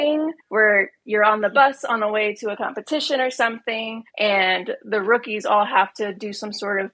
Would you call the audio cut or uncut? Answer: uncut